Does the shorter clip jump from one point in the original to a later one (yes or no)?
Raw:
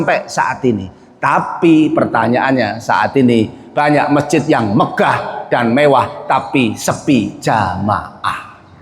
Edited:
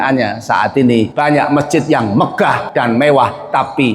yes